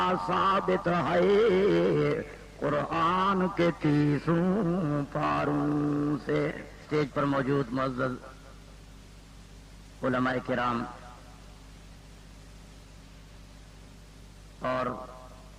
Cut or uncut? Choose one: cut